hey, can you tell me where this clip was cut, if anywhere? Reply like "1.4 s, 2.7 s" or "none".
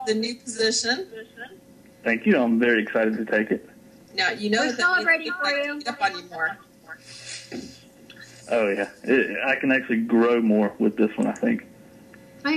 7.0 s